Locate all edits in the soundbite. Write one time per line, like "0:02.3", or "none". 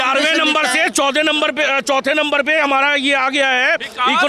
none